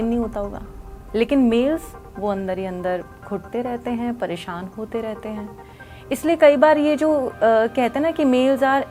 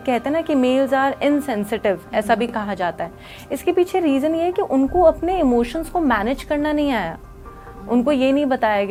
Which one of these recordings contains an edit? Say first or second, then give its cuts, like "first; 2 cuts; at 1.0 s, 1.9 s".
first; 1 cut; at 1.0 s